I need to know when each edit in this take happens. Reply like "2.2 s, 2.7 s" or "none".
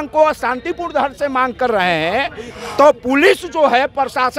none